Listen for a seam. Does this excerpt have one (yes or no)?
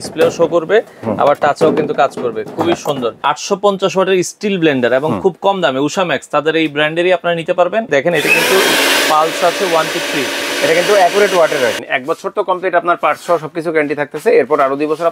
yes